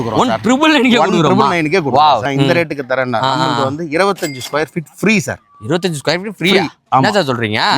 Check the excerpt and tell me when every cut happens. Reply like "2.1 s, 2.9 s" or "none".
2.2 s